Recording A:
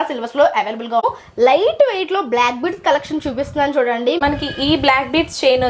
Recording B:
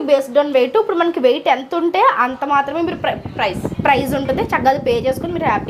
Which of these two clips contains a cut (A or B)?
A